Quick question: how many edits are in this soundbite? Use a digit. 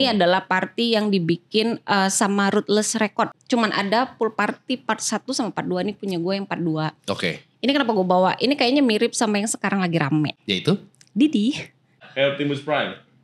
2